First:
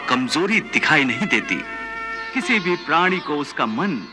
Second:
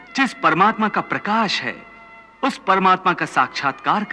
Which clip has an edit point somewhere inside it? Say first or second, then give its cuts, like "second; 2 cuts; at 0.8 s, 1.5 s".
first; 1 cut; at 2.1 s